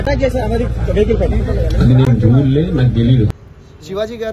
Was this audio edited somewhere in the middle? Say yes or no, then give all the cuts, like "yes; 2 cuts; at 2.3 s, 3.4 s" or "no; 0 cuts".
yes; 1 cut; at 3.3 s